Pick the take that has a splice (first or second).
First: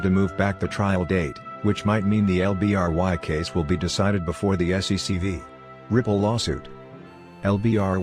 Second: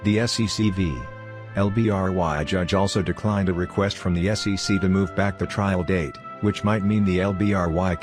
first